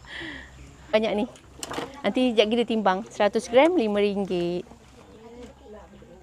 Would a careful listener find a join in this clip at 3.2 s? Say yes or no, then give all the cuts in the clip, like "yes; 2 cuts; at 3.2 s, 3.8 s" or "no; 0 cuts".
no; 1 cut; at 0.9 s